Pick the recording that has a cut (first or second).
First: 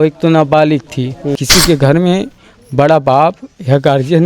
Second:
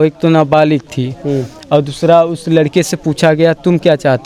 first